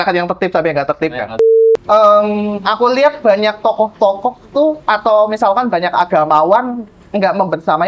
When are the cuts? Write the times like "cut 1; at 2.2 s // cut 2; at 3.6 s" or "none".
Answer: cut 1; at 1.4 s